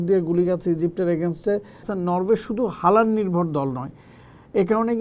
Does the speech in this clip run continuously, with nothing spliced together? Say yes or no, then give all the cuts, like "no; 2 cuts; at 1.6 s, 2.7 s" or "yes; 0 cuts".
no; 1 cut; at 1.9 s